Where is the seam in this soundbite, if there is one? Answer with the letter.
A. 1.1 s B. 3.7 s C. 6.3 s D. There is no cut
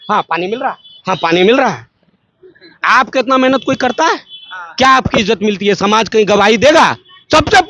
D